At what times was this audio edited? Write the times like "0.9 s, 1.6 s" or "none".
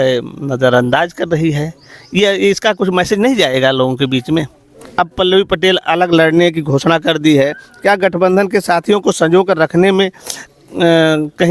4.8 s